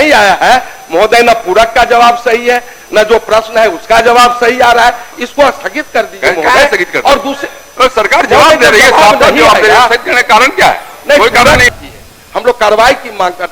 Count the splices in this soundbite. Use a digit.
1